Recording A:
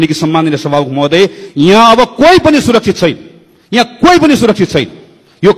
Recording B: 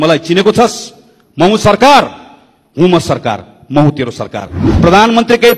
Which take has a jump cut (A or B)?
B